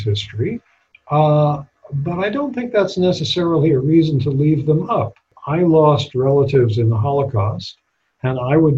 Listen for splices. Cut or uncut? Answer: cut